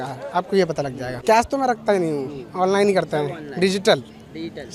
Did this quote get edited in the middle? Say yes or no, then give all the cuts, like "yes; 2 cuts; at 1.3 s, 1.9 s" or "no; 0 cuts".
no; 0 cuts